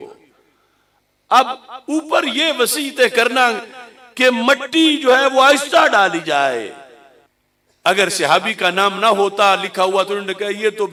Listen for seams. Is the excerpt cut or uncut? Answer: uncut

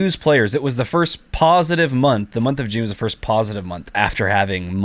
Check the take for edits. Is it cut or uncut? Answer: cut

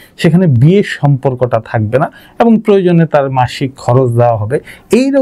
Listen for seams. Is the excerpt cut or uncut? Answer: uncut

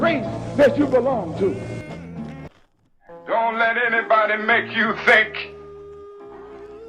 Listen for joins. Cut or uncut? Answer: cut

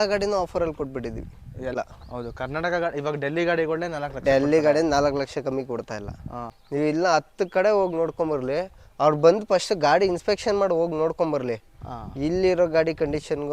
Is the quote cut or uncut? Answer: cut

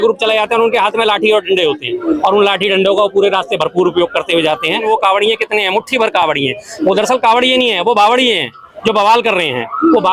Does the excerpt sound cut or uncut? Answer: cut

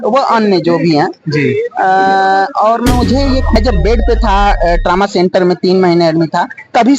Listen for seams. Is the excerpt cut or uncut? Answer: cut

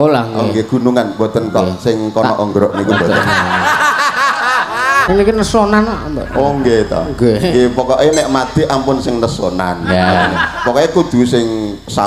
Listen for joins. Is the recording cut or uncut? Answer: cut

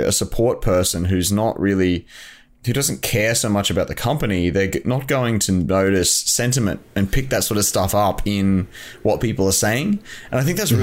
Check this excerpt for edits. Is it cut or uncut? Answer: uncut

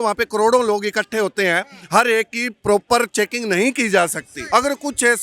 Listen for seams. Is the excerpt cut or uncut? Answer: cut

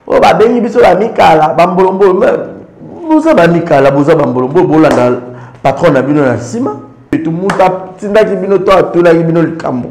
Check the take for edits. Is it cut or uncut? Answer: cut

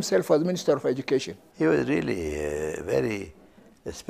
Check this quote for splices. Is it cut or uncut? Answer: cut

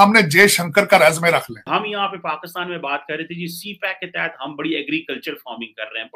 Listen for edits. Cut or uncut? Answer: cut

